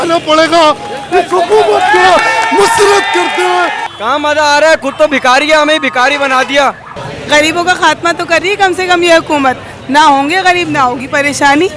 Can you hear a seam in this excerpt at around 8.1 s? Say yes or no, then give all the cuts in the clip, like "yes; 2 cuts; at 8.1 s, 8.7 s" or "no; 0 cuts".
no; 2 cuts; at 3.9 s, 6.9 s